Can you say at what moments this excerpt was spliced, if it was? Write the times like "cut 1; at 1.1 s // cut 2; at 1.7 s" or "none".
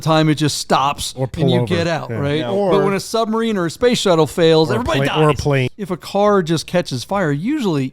cut 1; at 5.7 s